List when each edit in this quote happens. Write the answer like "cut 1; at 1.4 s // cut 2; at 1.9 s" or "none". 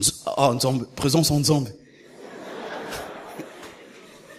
none